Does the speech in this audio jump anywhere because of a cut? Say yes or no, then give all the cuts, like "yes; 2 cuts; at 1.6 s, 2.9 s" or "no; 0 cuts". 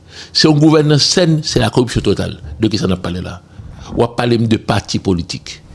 no; 0 cuts